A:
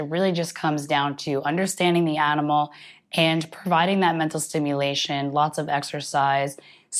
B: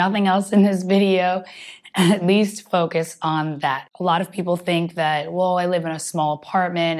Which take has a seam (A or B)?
B